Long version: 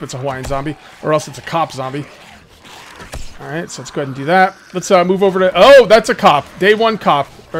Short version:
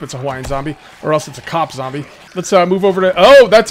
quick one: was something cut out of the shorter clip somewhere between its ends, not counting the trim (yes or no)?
yes